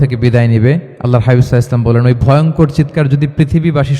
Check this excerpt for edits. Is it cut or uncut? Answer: cut